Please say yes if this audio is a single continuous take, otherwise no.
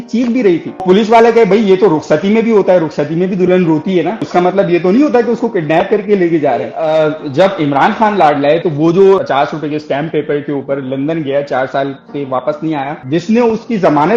no